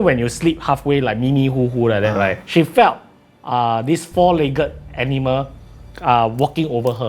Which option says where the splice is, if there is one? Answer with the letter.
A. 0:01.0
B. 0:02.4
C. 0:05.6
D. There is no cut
B